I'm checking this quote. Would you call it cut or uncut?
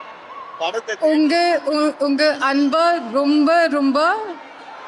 uncut